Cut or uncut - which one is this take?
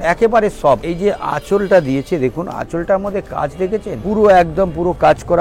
cut